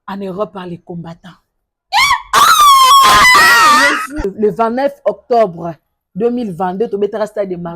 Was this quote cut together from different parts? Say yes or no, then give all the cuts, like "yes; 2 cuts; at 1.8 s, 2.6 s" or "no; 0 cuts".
yes; 1 cut; at 4.2 s